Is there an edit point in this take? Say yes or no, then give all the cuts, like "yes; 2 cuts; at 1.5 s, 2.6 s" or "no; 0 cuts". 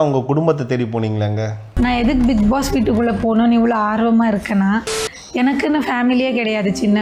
no; 0 cuts